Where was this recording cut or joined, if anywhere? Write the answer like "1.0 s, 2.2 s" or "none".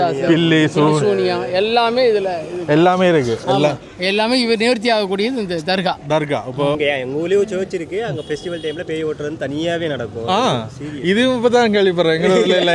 6.8 s